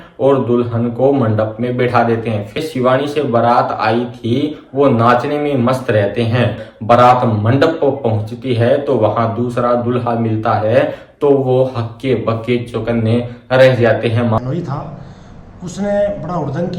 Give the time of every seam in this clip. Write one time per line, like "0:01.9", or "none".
0:02.6
0:06.7
0:14.4